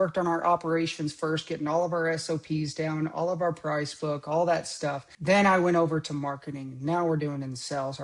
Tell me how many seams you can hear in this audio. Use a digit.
1